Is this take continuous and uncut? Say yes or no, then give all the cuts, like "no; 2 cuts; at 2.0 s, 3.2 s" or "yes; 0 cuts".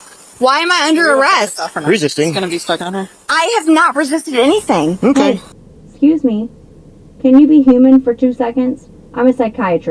no; 1 cut; at 5.1 s